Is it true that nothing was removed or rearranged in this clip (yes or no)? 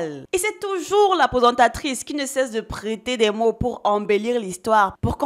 yes